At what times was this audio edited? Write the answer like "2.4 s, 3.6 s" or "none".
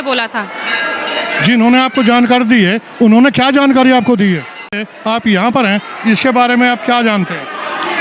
4.9 s